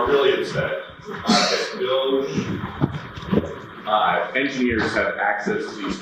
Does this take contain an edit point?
no; 0 cuts

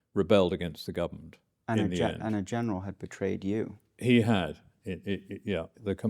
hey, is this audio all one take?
yes; 0 cuts

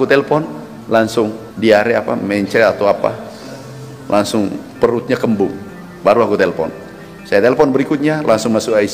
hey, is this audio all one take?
no; 1 cut; at 1.5 s

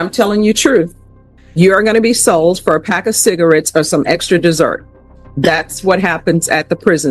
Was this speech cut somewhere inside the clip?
no; 0 cuts

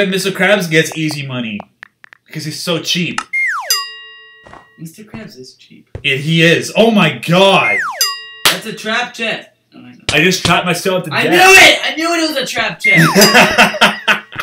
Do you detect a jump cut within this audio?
no; 0 cuts

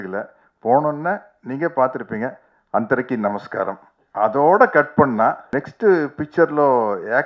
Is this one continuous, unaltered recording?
no; 1 cut; at 5.5 s

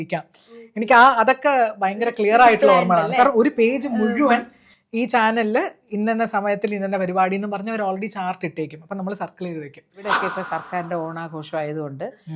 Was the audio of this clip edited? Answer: yes; 1 cut; at 10.2 s

